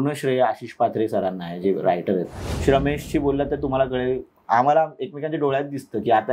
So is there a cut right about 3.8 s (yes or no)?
no